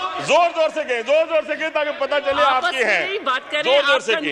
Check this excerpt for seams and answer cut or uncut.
uncut